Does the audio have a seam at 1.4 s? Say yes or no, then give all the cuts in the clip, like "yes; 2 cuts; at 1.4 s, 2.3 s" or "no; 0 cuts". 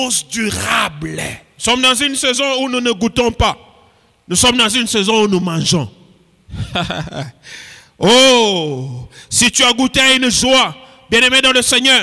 yes; 1 cut; at 1.4 s